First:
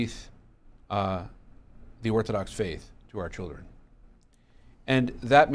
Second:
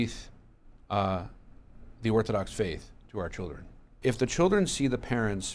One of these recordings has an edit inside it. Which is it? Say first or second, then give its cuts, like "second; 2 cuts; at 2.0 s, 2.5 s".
second; 1 cut; at 3.9 s